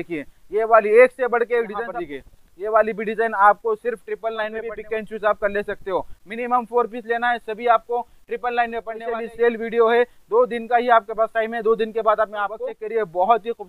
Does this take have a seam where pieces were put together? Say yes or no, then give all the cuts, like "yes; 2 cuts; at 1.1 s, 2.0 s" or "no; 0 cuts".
yes; 4 cuts; at 1.8 s, 4.7 s, 8.9 s, 12.7 s